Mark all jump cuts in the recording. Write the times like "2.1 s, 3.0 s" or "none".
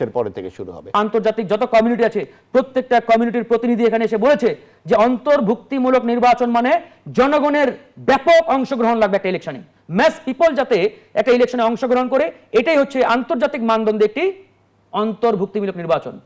1.0 s